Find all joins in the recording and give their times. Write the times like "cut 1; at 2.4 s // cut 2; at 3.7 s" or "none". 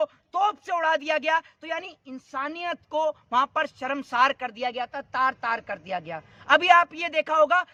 none